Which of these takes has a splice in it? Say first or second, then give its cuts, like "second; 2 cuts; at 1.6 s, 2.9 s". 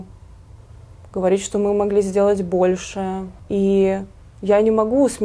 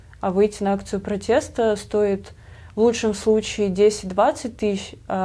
first; 1 cut; at 3.3 s